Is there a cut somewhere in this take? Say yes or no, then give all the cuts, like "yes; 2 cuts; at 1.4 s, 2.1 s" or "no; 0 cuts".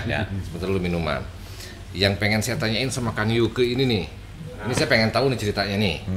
no; 0 cuts